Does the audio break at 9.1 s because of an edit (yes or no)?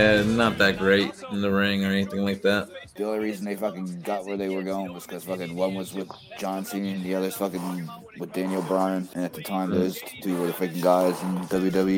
yes